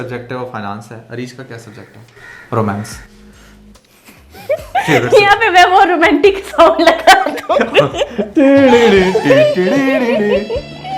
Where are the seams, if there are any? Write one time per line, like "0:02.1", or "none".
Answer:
none

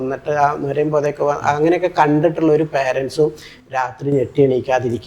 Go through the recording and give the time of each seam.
none

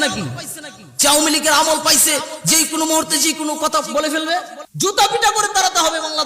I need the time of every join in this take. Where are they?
0:04.6

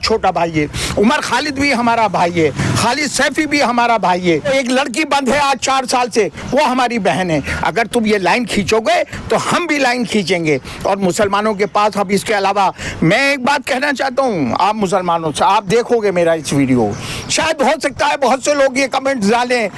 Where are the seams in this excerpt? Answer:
none

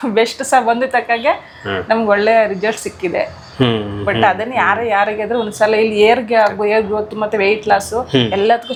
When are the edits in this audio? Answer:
none

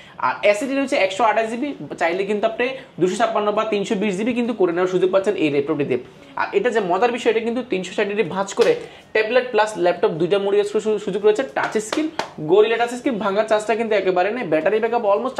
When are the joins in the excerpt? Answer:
none

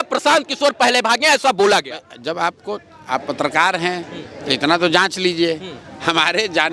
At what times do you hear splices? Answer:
none

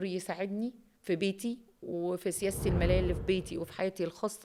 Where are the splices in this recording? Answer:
none

